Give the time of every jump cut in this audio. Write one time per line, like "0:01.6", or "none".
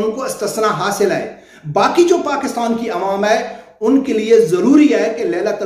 none

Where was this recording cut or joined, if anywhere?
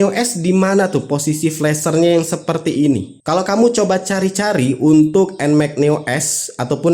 0:03.1

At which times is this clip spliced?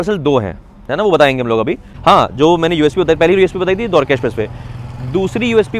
0:01.9

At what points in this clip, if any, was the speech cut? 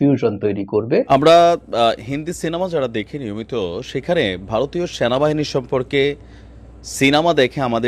0:01.1

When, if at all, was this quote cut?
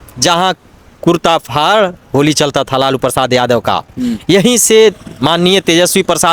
none

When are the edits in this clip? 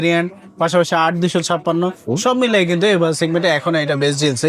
none

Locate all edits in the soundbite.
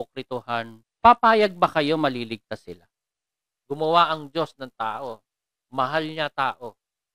0:02.9

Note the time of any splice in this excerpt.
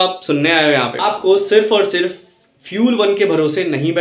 0:01.0

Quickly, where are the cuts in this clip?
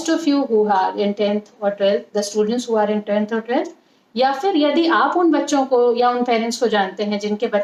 none

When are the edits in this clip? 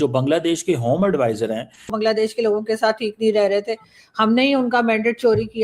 0:01.9

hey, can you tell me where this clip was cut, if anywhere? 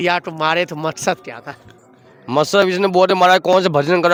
none

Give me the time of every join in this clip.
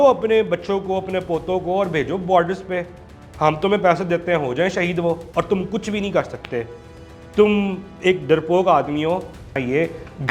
0:05.2
0:09.6

